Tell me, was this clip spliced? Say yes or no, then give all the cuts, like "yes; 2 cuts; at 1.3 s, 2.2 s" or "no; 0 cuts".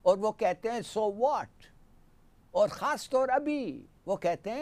no; 0 cuts